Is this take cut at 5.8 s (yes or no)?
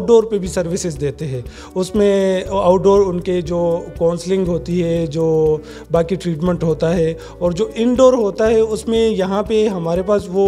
no